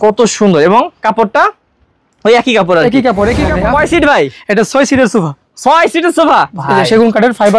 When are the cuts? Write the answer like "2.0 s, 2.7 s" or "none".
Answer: 3.4 s, 6.6 s